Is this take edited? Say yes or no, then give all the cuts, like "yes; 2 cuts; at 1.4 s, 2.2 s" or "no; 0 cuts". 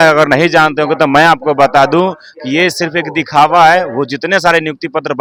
no; 0 cuts